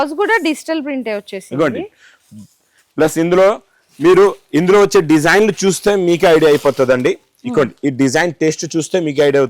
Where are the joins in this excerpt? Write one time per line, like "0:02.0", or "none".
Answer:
none